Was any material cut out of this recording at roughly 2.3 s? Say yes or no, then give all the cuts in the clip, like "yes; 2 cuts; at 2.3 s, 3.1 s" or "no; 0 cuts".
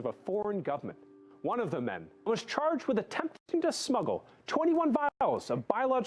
yes; 1 cut; at 2.3 s